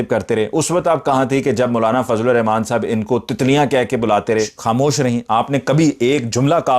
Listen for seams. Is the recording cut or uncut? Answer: cut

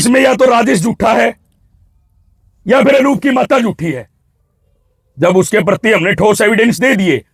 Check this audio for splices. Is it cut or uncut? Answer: uncut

